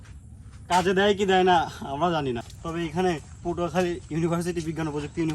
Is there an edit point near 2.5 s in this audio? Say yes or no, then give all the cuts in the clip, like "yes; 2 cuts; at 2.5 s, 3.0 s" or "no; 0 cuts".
yes; 1 cut; at 2.5 s